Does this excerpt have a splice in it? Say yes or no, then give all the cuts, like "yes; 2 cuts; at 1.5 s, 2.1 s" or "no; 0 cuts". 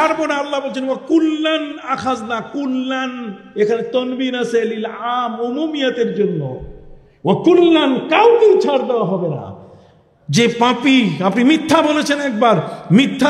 no; 0 cuts